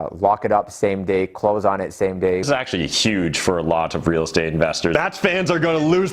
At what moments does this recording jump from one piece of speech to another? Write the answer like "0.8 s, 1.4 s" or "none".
2.4 s, 4.9 s